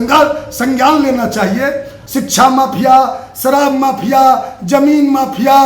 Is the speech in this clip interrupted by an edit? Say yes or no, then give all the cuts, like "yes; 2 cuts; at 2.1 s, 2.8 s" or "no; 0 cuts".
yes; 1 cut; at 2.0 s